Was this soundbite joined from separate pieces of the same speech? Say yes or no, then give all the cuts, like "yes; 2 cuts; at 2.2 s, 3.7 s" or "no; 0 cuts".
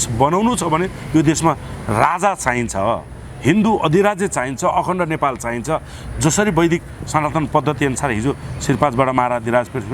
no; 0 cuts